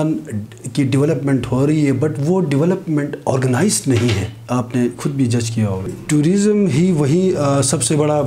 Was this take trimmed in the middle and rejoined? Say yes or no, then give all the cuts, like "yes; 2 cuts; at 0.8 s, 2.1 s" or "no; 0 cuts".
yes; 1 cut; at 6.0 s